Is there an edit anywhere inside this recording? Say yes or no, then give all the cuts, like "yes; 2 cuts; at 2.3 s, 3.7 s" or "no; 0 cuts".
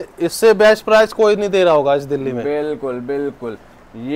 no; 0 cuts